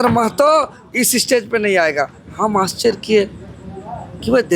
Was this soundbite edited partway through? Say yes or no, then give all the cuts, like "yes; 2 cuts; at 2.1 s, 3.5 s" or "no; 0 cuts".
no; 0 cuts